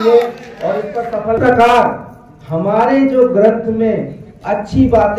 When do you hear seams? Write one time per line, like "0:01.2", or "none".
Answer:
0:01.4